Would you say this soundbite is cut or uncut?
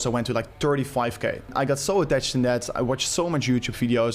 cut